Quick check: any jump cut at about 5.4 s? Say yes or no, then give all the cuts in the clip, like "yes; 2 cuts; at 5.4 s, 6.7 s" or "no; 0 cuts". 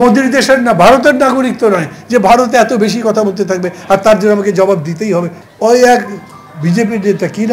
yes; 1 cut; at 5.4 s